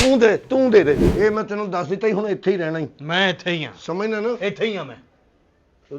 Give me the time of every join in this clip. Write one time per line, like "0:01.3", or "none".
0:01.0

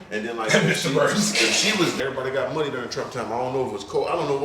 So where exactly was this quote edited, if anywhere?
0:02.0

